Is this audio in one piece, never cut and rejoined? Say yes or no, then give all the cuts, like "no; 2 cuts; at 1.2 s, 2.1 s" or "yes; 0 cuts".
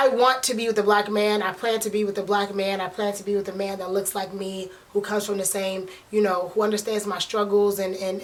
yes; 0 cuts